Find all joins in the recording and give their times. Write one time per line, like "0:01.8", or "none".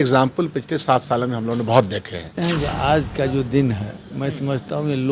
0:02.3